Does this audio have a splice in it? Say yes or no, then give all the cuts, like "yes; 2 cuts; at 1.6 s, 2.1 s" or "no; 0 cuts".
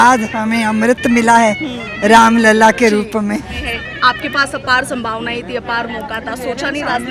yes; 1 cut; at 3.6 s